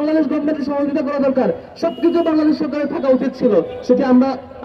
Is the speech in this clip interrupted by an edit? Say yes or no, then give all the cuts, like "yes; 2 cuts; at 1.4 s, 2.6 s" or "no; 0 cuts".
no; 0 cuts